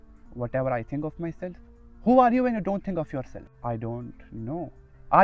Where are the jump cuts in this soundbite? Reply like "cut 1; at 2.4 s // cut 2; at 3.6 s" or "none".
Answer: cut 1; at 3.4 s